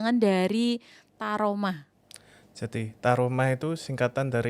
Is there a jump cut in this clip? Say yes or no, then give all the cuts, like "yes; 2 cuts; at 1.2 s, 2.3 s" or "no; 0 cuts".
no; 0 cuts